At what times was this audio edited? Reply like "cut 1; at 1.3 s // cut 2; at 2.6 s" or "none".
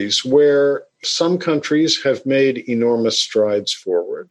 cut 1; at 1.0 s